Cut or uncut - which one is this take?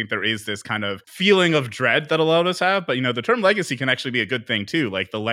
cut